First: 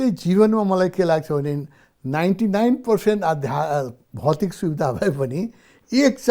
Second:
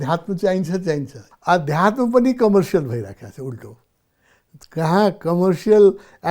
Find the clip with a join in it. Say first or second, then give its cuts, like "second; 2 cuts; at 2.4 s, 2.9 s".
second; 1 cut; at 1.2 s